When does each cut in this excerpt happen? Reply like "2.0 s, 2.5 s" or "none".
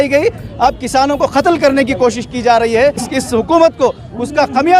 3.1 s